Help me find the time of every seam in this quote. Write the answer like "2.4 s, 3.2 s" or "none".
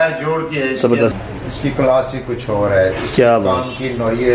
1.1 s

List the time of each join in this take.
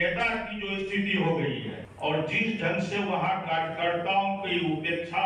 1.8 s

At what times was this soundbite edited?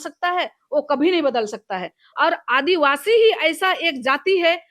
none

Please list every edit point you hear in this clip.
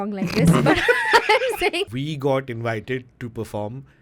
1.9 s

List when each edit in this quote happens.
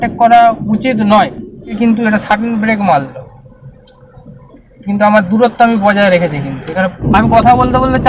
1.8 s, 7.0 s

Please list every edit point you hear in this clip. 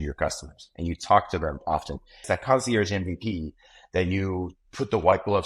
2.2 s

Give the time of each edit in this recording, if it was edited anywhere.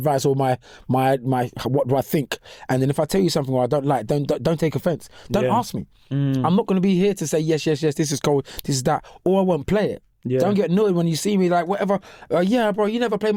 none

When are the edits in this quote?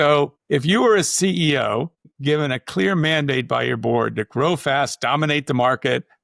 2.0 s

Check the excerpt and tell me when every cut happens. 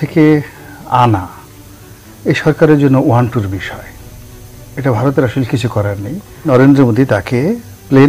6.5 s

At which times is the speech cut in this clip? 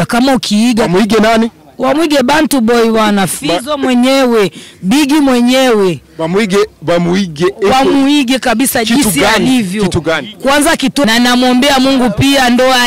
11.0 s

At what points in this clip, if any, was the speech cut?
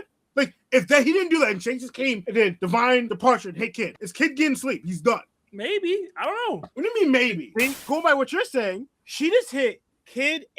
7.8 s

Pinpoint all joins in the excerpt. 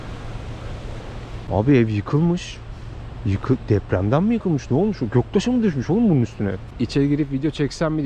1.5 s, 6.7 s

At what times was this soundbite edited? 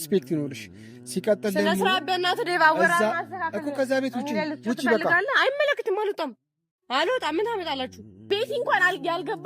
8.2 s

